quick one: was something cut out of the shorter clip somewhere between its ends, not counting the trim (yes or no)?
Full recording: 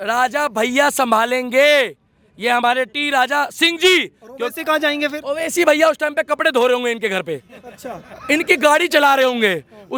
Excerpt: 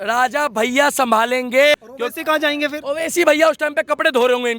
yes